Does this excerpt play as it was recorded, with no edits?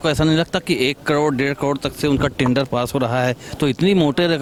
yes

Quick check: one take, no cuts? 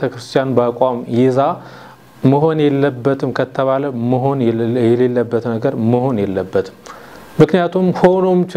yes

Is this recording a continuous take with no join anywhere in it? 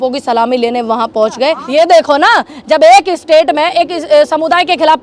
no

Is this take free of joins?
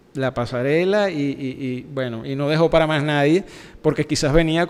yes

